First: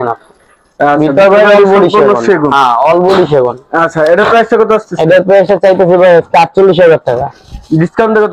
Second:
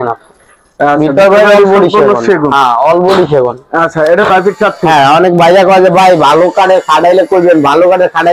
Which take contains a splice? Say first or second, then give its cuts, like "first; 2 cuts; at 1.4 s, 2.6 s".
second; 1 cut; at 4.3 s